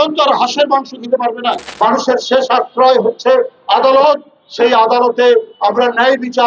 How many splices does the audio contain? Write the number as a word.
one